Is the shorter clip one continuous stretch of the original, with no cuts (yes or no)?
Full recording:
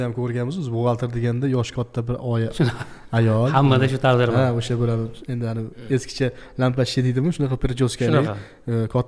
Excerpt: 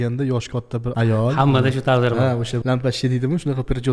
no